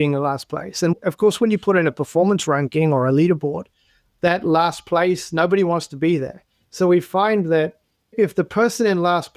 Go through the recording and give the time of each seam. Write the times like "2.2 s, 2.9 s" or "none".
0.9 s